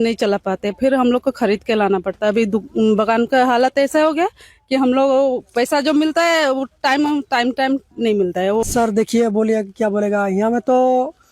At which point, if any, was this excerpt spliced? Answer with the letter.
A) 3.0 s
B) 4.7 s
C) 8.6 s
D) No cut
C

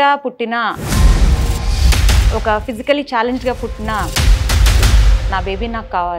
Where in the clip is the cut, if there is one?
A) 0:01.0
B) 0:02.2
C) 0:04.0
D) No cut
D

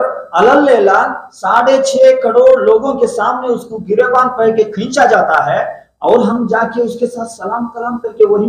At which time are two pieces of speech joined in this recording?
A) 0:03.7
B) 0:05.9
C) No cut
C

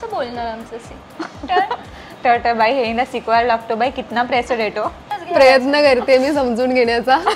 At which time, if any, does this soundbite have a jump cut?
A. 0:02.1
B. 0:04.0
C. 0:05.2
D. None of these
C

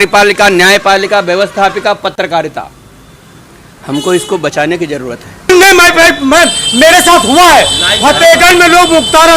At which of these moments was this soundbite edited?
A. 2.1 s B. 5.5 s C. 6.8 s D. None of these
B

